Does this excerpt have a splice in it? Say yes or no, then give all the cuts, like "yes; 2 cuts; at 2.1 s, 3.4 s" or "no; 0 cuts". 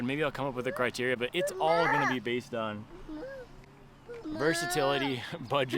yes; 1 cut; at 1.3 s